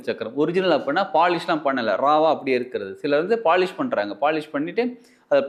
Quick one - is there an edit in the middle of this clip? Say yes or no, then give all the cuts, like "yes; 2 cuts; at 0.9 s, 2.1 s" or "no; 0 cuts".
no; 0 cuts